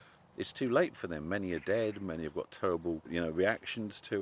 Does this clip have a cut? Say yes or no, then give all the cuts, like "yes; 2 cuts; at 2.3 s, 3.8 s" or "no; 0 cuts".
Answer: yes; 1 cut; at 3.0 s